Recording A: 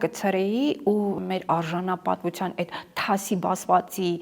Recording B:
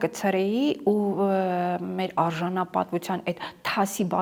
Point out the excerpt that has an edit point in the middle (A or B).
A